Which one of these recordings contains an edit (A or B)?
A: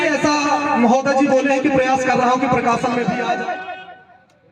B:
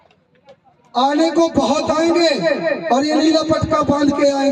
A